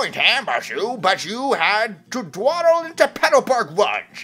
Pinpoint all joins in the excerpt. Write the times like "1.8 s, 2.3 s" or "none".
none